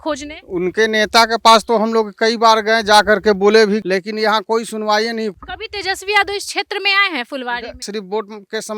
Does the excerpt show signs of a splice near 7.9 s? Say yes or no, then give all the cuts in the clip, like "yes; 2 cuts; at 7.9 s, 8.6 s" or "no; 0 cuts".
yes; 3 cuts; at 3.8 s, 5.3 s, 7.9 s